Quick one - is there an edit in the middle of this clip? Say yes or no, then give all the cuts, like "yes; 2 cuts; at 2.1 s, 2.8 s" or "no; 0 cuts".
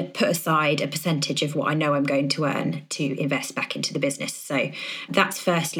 no; 0 cuts